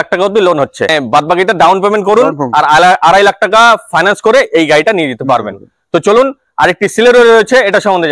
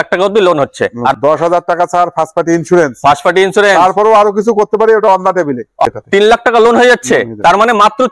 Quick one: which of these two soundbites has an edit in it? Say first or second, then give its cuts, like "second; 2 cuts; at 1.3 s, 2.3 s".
second; 2 cuts; at 1.1 s, 5.9 s